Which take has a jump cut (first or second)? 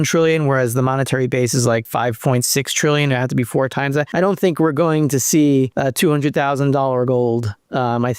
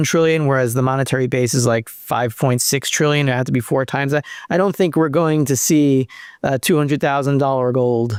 first